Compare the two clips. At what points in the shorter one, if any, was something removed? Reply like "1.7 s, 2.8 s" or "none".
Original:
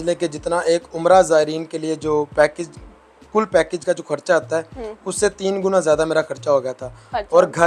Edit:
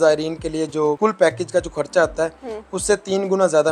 1.0 s